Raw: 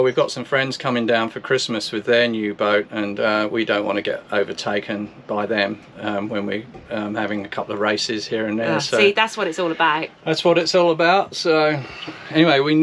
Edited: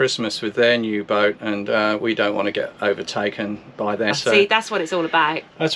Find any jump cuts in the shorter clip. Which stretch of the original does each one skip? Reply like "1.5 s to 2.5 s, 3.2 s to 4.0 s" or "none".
5.6 s to 8.8 s